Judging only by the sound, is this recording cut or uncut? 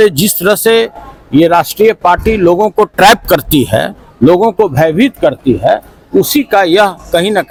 uncut